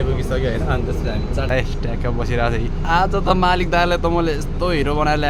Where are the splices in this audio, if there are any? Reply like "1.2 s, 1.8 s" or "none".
1.5 s